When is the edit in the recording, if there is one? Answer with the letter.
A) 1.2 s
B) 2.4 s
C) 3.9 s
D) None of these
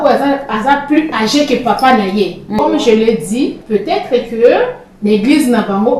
B